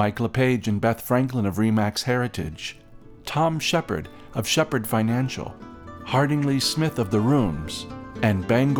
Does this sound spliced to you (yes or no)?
no